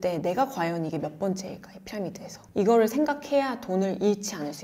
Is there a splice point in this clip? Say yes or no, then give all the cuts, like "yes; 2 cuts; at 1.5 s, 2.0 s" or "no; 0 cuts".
no; 0 cuts